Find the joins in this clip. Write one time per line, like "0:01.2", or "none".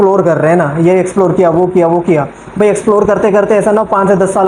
none